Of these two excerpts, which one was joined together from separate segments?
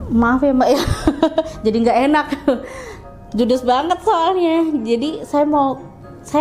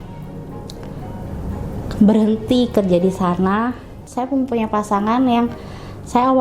second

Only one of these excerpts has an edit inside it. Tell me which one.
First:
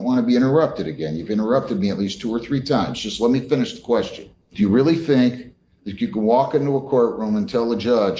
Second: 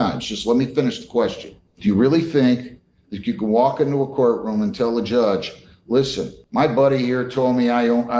second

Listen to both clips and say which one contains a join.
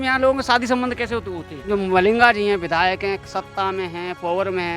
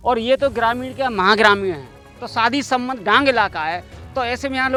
first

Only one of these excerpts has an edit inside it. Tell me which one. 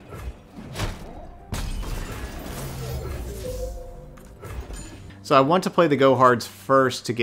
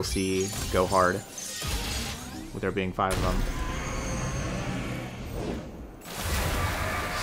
first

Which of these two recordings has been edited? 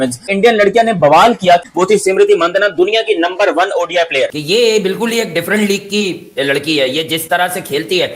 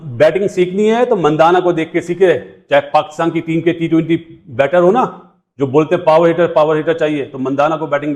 first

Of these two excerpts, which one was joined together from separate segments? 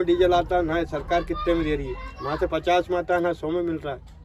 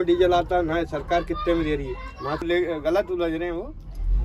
second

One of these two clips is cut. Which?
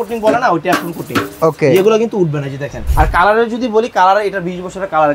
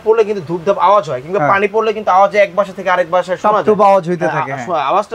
first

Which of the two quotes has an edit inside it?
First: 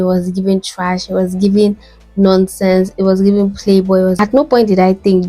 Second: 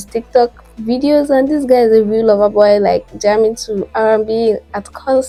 first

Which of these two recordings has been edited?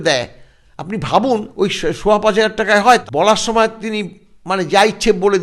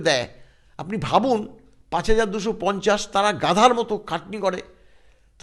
first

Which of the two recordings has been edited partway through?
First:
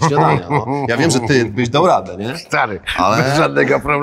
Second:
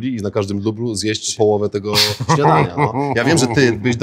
second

